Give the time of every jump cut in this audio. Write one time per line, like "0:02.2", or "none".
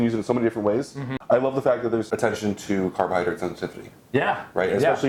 0:01.0
0:02.1